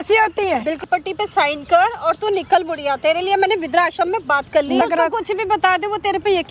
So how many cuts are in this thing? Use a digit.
2